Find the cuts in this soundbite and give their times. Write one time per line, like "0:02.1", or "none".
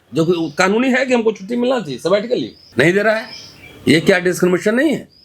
0:02.6